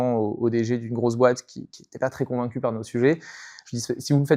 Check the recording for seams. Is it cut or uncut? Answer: uncut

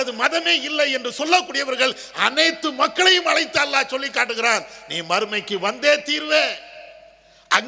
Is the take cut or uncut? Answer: uncut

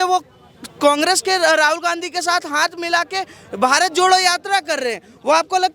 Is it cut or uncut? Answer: uncut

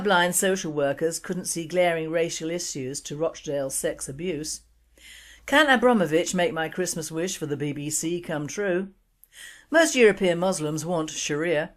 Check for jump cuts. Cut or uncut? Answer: cut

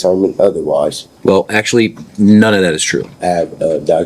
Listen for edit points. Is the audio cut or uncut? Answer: cut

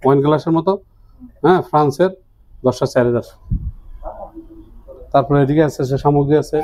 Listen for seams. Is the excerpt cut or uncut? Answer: uncut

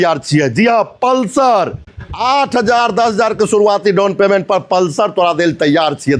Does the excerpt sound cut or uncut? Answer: uncut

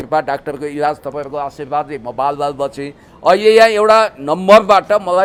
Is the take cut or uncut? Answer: uncut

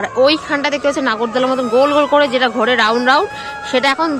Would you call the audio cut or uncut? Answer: uncut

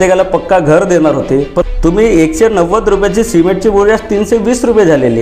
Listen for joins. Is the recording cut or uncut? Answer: cut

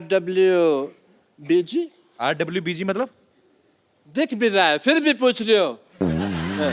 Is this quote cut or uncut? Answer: uncut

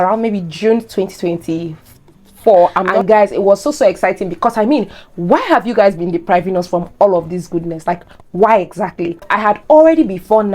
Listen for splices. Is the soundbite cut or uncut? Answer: cut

